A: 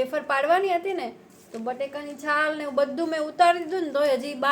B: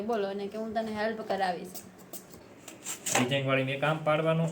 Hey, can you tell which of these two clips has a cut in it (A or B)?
B